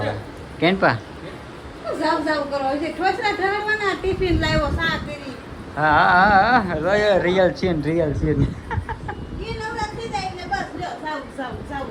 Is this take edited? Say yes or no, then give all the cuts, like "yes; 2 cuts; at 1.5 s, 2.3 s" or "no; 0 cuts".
no; 0 cuts